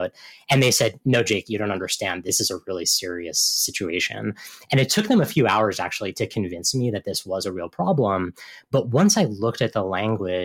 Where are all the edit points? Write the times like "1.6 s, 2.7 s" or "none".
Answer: 2.2 s